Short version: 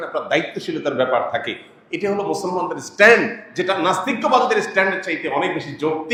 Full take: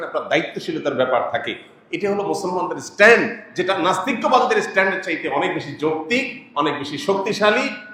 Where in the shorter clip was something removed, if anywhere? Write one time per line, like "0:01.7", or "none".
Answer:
none